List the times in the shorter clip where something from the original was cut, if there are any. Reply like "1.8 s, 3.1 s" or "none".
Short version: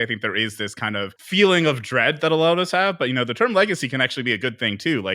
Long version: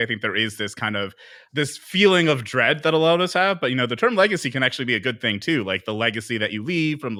1.2 s

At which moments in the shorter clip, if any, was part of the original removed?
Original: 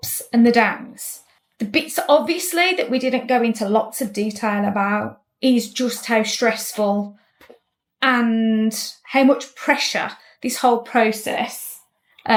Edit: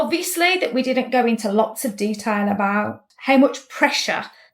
3.0 s

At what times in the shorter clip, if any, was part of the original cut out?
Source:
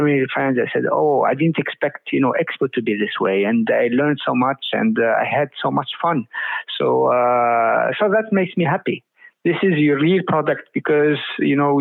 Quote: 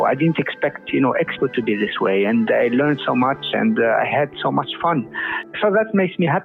5.5 s

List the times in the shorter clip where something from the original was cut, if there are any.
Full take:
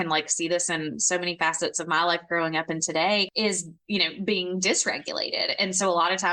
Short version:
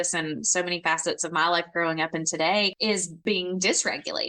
3.1 s

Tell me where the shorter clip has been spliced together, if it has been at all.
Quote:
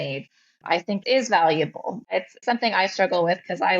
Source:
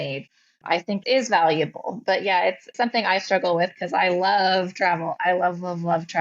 2.1 s

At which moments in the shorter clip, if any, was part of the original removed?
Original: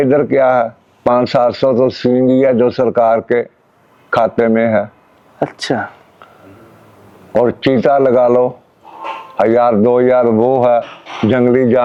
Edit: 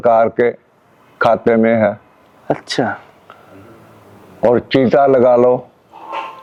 none

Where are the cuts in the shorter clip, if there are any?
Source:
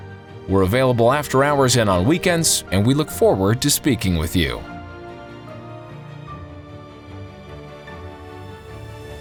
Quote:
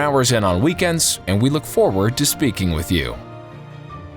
3.2 s

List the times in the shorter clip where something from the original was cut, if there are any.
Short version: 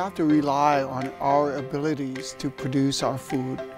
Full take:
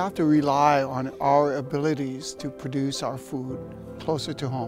none

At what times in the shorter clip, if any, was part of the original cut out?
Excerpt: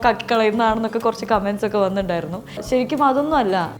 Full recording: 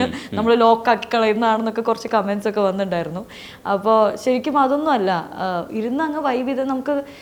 2.6 s

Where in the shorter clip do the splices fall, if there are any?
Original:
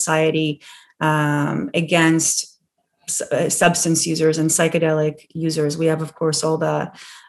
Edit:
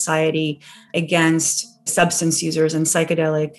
0.9 s, 1.9 s

